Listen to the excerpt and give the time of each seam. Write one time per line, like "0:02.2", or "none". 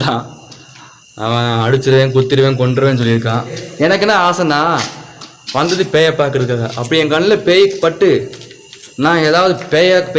0:03.6